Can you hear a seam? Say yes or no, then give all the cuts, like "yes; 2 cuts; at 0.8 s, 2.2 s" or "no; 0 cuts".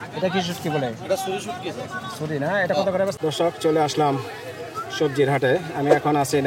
yes; 1 cut; at 3.2 s